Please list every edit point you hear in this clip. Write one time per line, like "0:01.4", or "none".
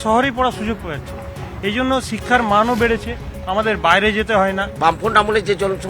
0:04.7